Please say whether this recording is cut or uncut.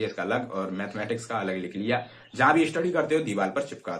uncut